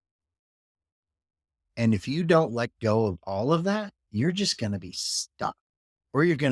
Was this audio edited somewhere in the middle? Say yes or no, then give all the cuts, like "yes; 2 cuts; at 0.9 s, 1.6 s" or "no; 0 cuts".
no; 0 cuts